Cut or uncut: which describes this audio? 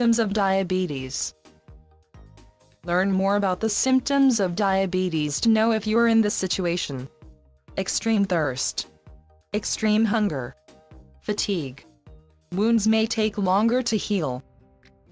uncut